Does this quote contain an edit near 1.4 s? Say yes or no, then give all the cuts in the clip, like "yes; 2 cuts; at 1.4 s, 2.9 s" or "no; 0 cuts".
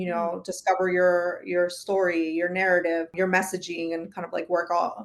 no; 1 cut; at 3.1 s